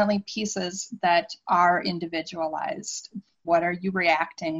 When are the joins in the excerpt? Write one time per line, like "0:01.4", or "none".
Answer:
0:03.4